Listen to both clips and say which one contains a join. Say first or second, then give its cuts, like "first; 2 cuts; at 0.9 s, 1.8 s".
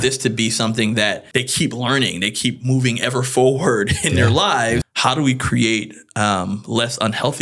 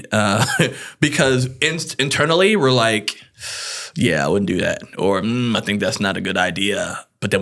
first; 2 cuts; at 1.2 s, 4.9 s